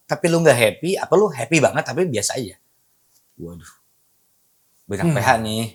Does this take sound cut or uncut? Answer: uncut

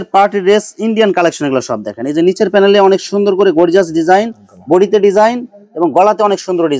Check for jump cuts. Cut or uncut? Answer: uncut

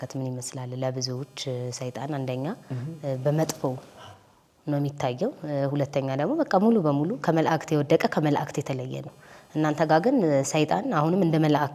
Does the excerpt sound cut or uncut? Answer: uncut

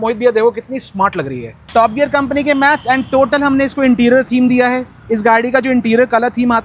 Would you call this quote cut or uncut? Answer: cut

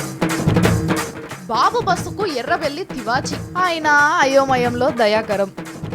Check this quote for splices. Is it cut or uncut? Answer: cut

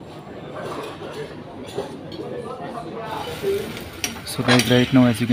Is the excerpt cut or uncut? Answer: cut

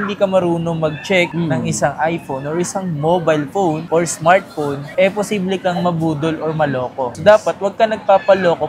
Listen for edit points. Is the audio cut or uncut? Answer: uncut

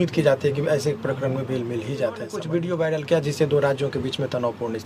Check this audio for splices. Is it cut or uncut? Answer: cut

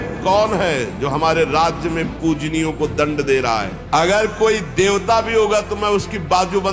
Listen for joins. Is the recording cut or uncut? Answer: cut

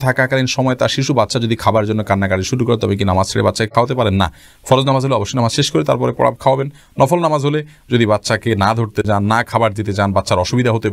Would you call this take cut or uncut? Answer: uncut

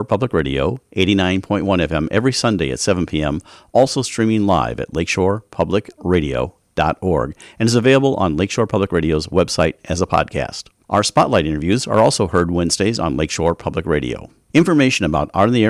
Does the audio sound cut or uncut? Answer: cut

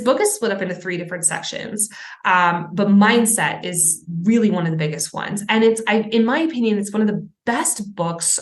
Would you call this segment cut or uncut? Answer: uncut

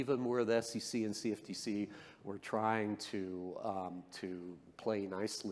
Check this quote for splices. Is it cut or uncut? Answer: uncut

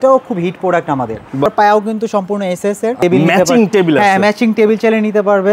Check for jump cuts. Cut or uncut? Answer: cut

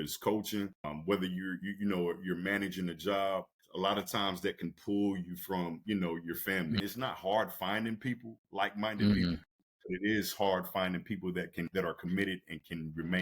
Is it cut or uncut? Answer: cut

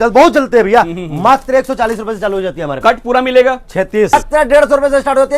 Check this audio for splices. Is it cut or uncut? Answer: cut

